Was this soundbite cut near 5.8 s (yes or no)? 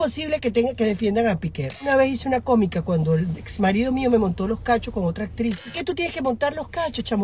yes